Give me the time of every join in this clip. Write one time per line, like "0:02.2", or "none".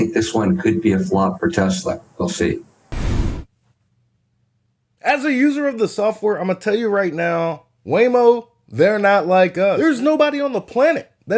none